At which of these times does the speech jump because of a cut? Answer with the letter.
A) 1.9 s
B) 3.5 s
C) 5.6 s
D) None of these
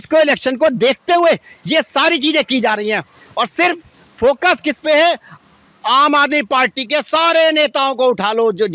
D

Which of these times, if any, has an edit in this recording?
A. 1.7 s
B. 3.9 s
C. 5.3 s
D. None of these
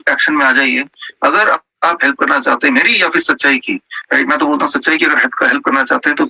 D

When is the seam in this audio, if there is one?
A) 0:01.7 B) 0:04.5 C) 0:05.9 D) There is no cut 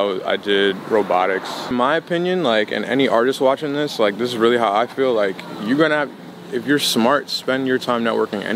A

